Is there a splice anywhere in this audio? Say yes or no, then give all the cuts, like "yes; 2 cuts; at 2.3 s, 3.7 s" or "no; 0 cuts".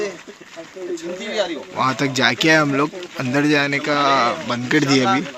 no; 0 cuts